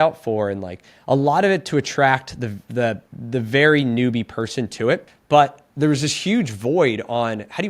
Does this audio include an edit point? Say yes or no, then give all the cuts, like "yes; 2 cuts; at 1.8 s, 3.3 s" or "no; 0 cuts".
yes; 2 cuts; at 3.1 s, 5.1 s